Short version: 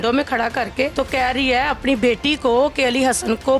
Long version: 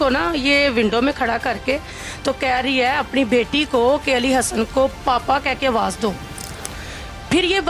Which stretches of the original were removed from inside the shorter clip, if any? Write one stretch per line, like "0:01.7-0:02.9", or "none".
0:01.8-0:02.2